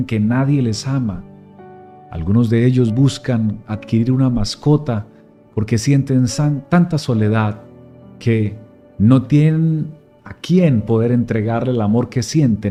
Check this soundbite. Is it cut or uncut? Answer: uncut